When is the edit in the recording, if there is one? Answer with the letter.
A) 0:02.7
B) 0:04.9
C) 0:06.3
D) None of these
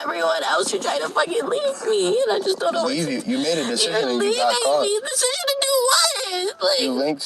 B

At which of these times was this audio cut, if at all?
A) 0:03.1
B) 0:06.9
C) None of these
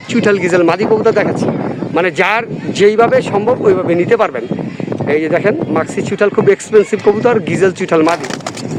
C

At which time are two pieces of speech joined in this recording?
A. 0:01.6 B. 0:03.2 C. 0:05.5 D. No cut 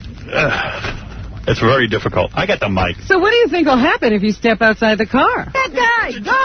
C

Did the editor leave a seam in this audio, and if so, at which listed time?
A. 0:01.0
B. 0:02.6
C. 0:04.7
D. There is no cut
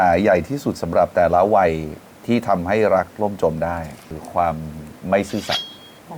D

